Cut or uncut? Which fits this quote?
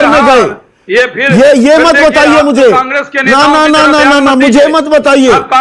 uncut